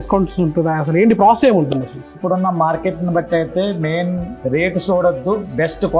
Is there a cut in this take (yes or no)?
yes